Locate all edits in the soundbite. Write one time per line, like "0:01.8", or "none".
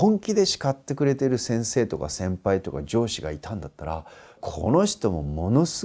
0:01.4
0:04.4

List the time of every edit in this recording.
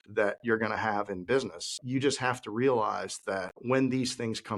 0:01.7
0:03.5

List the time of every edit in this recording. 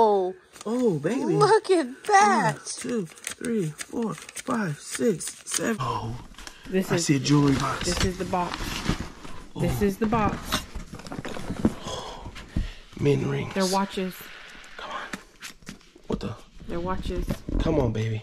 0:05.8

